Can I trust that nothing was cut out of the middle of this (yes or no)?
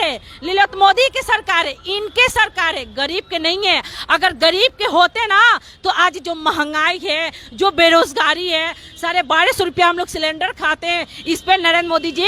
yes